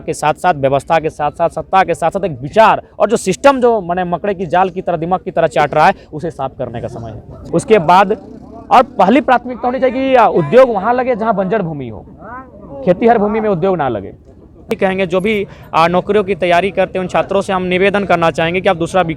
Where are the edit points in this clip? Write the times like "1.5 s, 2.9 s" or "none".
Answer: 7.3 s, 14.7 s